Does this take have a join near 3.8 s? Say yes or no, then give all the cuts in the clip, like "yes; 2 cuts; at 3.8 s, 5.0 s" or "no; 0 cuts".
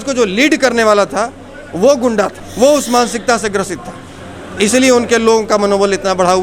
no; 1 cut; at 2.4 s